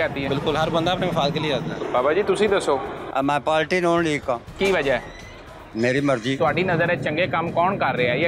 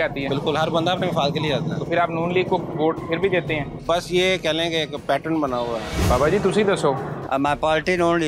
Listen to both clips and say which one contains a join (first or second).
first